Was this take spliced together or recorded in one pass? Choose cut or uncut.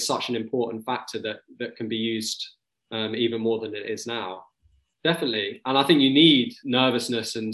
cut